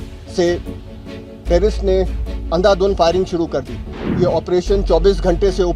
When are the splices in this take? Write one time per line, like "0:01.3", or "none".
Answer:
0:04.0